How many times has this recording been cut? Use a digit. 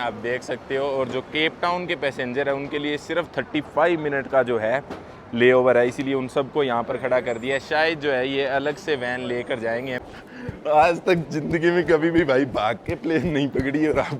1